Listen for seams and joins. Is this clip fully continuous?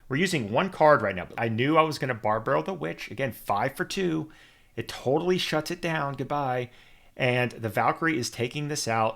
no; 1 cut; at 1.4 s

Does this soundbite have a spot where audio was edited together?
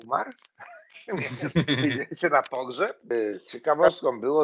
yes; 1 cut; at 3.0 s

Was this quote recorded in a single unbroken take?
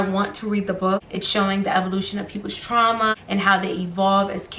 no; 1 cut; at 1.2 s

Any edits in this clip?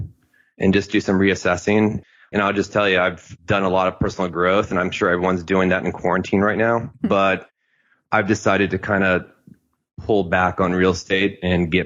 yes; 1 cut; at 2.1 s

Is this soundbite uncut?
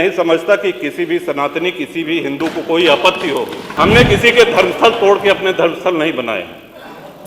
no; 1 cut; at 3.6 s

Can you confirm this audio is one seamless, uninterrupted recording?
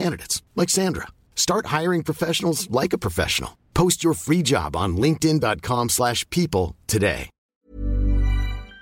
no; 1 cut; at 7.7 s

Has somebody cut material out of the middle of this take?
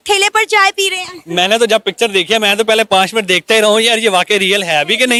no; 0 cuts

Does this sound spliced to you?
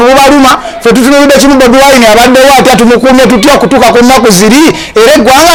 no; 0 cuts

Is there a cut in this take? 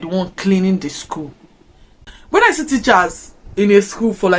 yes; 1 cut; at 1.9 s

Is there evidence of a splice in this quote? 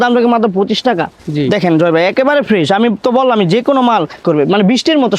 yes; 2 cuts; at 1.1 s, 4.2 s

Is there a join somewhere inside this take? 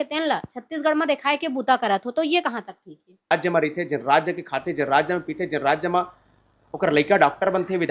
yes; 1 cut; at 3.3 s

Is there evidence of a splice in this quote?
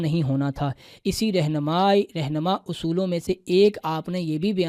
no; 0 cuts

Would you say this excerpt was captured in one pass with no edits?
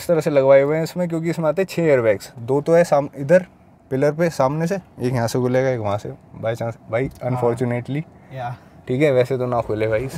yes; 0 cuts

